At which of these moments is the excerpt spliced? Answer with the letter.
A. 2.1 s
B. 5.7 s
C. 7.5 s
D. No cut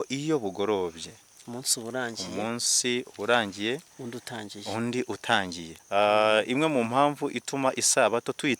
B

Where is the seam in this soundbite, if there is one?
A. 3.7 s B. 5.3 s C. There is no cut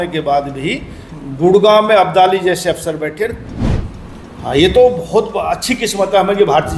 A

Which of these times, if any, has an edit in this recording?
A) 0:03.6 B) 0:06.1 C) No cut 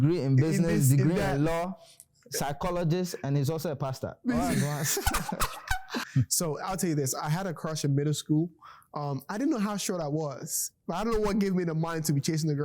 B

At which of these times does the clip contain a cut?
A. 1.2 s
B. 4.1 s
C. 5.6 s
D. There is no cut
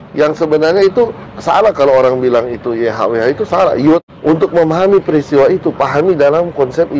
B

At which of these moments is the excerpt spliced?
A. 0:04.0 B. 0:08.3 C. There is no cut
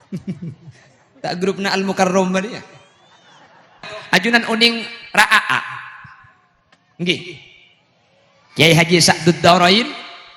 A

